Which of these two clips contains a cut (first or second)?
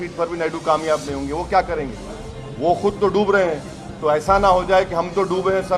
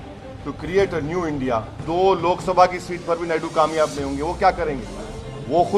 second